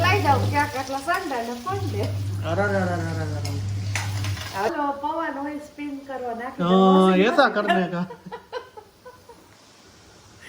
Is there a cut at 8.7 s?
no; 1 cut; at 4.7 s

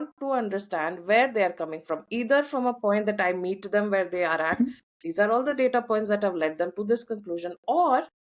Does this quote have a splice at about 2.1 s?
no; 0 cuts

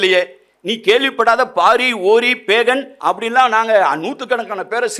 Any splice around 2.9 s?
yes; 1 cut; at 2.9 s

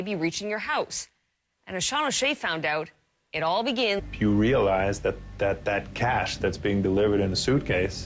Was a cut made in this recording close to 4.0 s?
no; 0 cuts

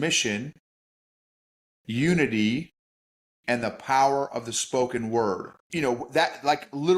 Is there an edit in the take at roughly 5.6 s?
yes; 1 cut; at 5.6 s

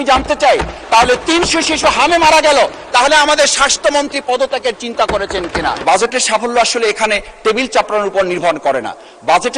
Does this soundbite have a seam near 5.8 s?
yes; 1 cut; at 5.8 s

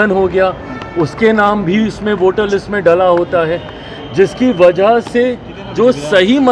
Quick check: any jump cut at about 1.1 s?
no; 0 cuts

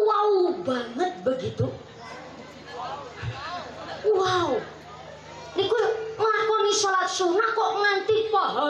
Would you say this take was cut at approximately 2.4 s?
no; 0 cuts

